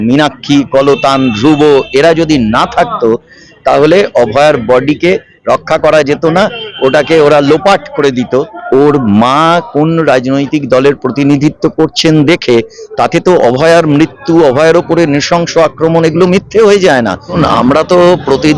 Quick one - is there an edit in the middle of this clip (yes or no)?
yes